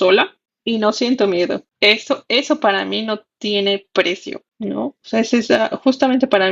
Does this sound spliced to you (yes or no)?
no